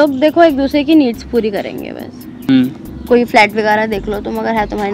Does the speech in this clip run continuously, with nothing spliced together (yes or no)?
no